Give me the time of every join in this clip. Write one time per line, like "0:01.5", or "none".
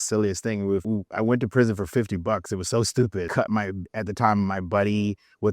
0:00.8
0:03.3